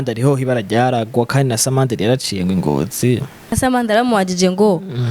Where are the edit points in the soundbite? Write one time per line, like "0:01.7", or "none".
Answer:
0:03.5